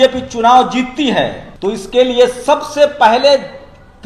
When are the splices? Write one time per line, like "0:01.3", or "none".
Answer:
0:01.5